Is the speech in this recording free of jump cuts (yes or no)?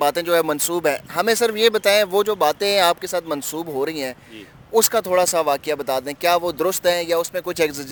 yes